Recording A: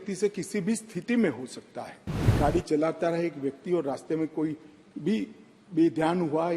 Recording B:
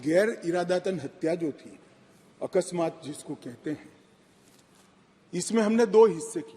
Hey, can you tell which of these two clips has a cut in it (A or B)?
A